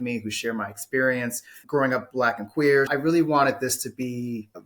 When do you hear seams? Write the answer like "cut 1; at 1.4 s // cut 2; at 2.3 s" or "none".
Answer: cut 1; at 1.6 s